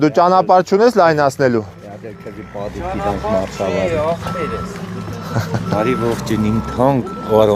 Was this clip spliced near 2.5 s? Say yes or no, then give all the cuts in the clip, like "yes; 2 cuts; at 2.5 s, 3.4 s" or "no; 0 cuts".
no; 0 cuts